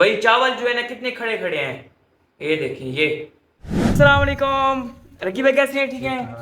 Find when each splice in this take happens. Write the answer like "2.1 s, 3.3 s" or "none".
3.9 s

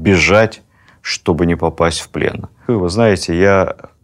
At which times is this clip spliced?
2.6 s

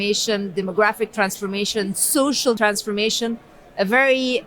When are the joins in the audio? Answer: 2.6 s

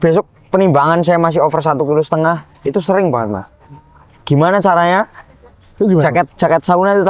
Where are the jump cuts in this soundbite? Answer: none

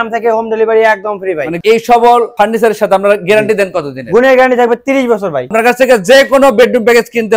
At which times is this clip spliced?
1.6 s, 5.5 s

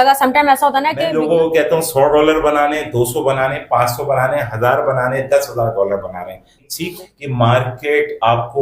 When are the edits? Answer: 1.0 s, 6.7 s

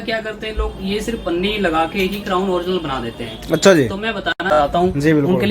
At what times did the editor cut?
4.5 s

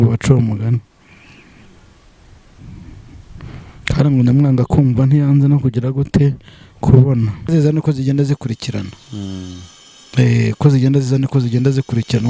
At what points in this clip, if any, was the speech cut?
7.5 s

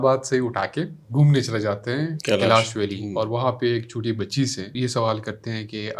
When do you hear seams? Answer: 1.0 s, 2.2 s, 4.7 s

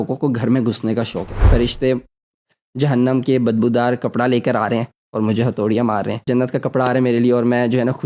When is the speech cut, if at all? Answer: 1.5 s, 6.3 s

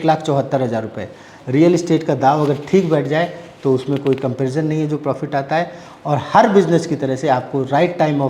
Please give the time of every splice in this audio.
1.3 s

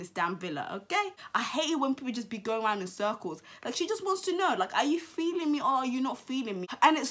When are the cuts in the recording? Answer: none

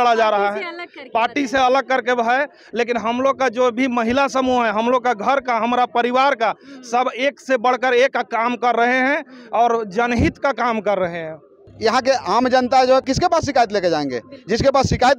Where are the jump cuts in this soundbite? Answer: 11.7 s, 13.0 s

